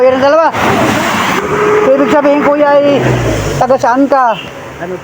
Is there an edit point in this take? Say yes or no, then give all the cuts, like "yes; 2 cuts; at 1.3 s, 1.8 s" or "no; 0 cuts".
yes; 1 cut; at 1.4 s